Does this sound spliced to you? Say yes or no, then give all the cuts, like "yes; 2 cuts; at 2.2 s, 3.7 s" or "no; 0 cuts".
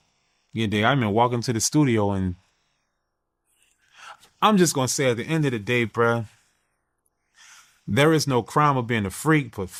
no; 0 cuts